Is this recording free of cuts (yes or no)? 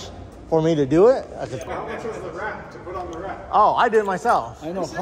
no